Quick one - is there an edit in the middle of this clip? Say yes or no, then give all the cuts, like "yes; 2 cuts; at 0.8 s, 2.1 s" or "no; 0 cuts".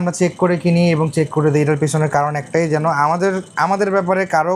no; 0 cuts